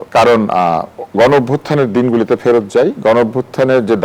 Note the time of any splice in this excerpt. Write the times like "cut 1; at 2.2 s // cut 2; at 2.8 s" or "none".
cut 1; at 1.0 s